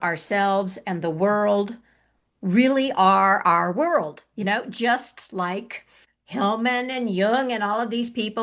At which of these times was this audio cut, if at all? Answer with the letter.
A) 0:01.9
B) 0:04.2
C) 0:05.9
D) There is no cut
D